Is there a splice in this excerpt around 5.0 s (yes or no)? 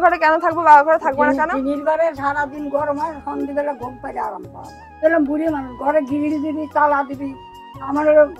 yes